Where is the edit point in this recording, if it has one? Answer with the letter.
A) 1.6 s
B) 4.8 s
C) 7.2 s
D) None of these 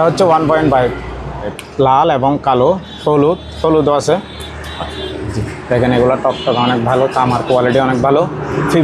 A